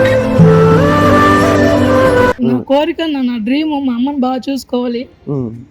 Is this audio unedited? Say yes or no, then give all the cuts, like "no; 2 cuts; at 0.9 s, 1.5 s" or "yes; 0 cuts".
no; 1 cut; at 2.4 s